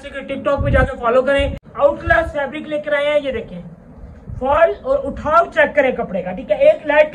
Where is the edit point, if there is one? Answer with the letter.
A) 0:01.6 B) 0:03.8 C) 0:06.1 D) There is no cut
A